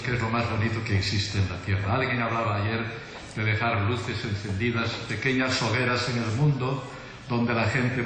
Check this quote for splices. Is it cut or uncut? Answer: cut